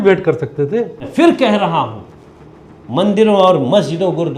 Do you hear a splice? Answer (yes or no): yes